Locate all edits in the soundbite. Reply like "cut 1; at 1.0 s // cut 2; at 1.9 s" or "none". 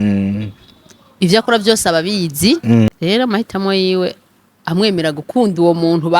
cut 1; at 2.9 s